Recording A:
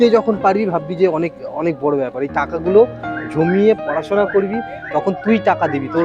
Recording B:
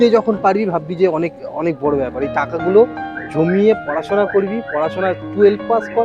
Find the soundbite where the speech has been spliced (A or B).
A